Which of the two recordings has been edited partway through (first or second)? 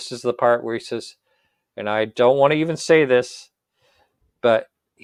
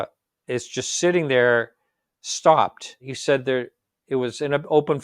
second